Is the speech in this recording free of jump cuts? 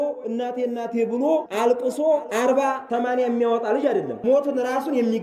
no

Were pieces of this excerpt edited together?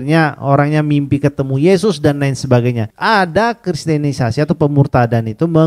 yes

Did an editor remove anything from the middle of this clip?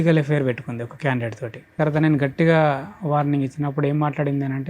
yes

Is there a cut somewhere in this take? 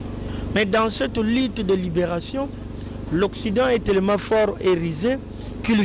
no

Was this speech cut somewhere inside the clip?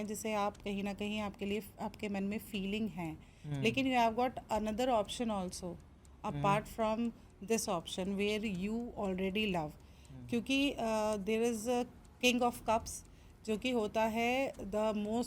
no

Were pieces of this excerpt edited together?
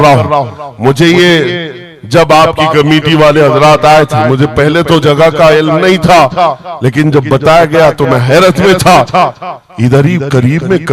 no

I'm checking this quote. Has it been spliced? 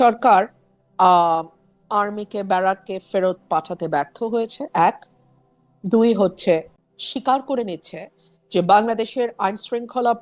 yes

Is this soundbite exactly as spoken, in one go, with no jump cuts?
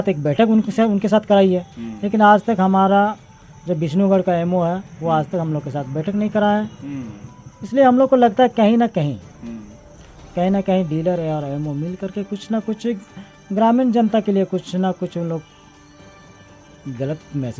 yes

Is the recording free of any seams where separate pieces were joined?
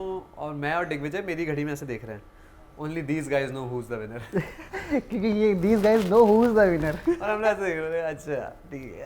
yes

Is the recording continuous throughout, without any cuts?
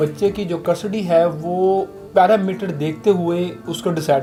yes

